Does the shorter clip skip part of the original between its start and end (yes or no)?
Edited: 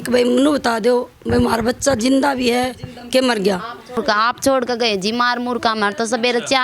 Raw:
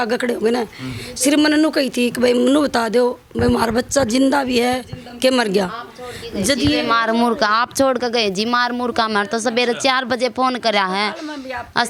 yes